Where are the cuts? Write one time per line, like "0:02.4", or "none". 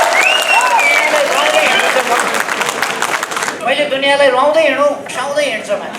0:03.6
0:05.1